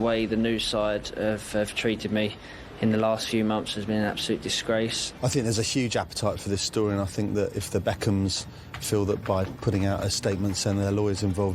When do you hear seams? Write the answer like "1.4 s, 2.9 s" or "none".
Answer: 5.0 s